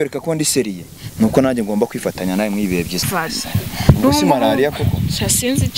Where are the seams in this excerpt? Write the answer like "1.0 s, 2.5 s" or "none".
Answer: 3.0 s